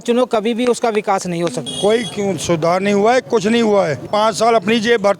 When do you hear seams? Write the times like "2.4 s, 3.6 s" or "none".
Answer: 1.6 s, 4.1 s